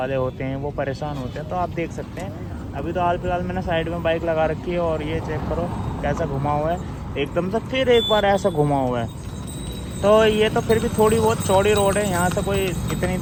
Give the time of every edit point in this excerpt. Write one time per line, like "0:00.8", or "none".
none